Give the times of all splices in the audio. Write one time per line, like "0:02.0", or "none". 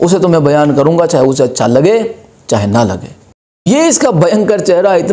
0:03.7